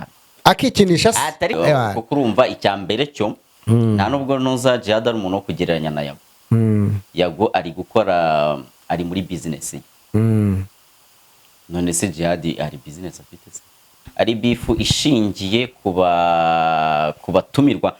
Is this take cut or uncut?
cut